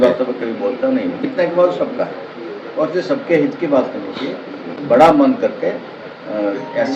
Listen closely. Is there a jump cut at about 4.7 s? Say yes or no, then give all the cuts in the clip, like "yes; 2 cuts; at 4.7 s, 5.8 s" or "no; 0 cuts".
yes; 2 cuts; at 1.3 s, 4.7 s